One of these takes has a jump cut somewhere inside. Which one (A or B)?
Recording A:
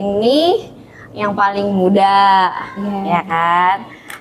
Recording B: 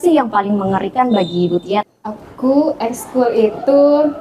B